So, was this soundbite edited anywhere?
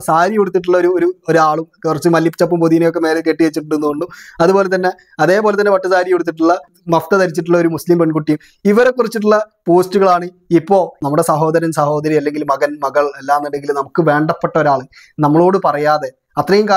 yes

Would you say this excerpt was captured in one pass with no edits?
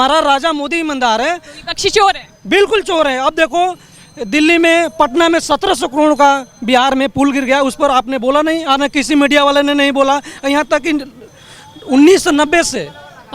yes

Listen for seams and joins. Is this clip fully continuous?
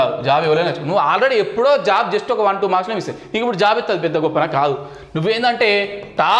yes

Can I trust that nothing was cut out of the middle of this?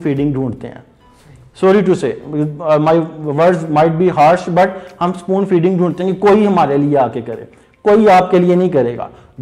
yes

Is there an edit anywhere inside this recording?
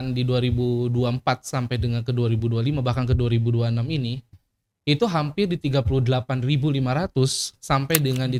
no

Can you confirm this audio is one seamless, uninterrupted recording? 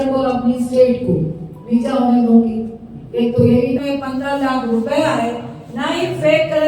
no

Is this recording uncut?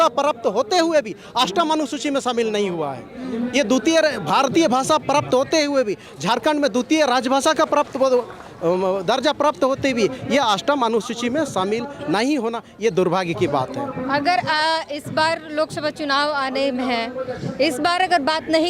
yes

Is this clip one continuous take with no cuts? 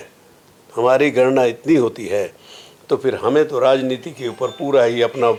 yes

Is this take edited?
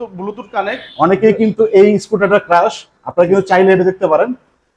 no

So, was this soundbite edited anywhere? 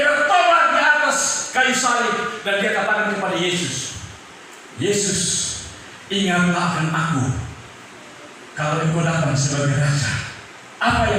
no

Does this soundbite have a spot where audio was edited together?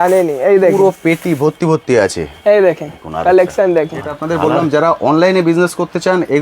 yes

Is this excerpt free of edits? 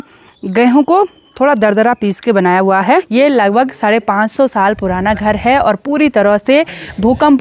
no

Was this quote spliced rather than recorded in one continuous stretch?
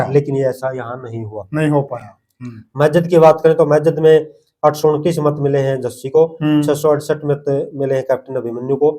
no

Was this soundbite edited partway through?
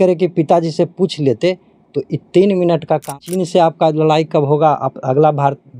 yes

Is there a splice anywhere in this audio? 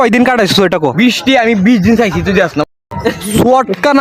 no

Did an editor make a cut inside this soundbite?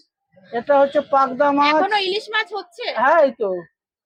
no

